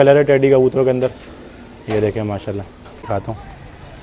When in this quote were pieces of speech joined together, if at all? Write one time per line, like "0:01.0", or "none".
0:03.1